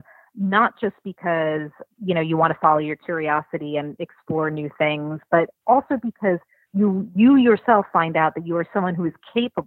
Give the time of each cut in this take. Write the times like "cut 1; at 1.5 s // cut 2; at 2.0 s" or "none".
cut 1; at 1.8 s // cut 2; at 6.7 s